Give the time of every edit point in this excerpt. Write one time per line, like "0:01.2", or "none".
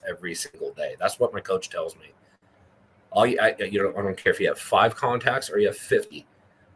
none